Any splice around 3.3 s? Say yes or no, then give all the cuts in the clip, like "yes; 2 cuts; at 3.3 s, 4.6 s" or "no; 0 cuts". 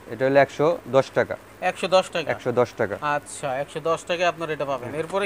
no; 0 cuts